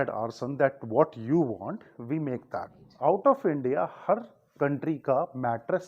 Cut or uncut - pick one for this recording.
cut